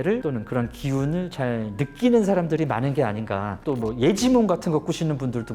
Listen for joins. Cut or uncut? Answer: cut